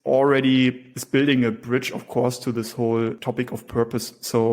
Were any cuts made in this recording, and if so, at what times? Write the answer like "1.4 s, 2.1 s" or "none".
0.9 s, 3.2 s

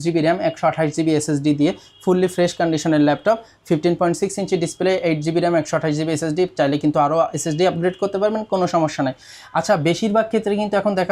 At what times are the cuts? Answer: none

